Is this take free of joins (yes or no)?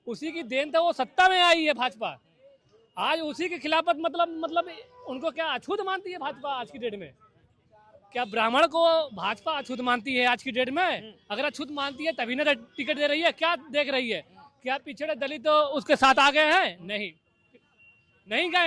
yes